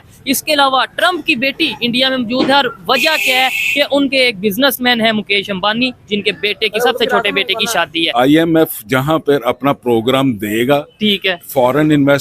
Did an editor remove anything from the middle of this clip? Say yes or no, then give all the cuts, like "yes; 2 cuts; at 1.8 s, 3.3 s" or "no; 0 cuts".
yes; 1 cut; at 8.1 s